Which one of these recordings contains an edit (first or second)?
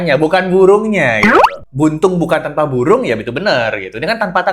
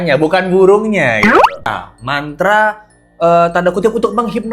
second